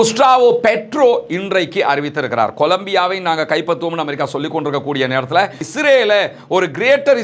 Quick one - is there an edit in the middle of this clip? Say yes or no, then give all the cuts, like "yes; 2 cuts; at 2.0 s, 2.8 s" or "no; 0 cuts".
yes; 1 cut; at 5.6 s